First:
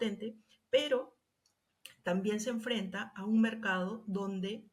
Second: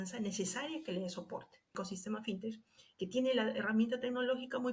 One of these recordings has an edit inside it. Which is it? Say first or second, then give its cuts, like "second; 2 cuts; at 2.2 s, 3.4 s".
second; 1 cut; at 1.8 s